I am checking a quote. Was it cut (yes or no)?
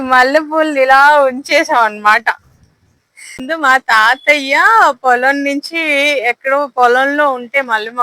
yes